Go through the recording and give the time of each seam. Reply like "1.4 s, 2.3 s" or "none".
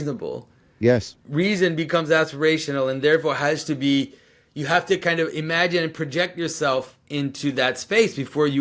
1.1 s